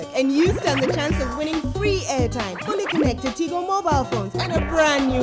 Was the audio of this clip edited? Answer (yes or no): no